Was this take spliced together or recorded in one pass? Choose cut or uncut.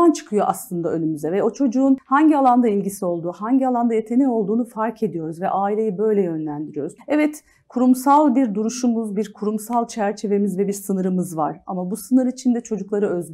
cut